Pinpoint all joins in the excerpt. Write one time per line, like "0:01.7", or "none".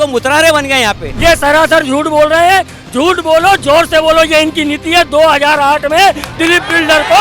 0:01.1